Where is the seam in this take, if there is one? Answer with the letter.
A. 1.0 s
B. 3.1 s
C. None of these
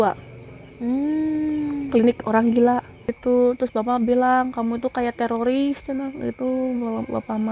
B